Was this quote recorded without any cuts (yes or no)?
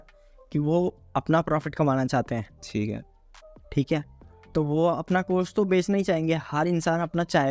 yes